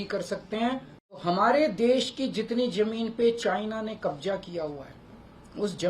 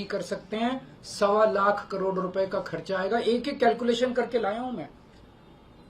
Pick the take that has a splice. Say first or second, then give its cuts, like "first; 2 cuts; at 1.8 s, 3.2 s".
first; 1 cut; at 1.2 s